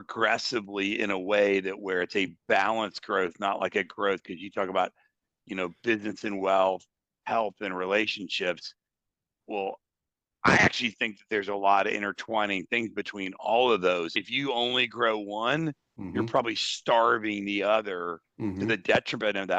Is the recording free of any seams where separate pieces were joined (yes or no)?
no